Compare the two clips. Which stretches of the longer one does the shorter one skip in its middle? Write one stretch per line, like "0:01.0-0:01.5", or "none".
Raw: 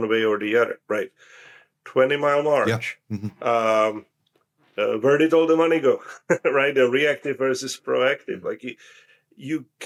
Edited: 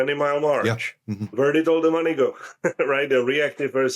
0:03.3-0:05.0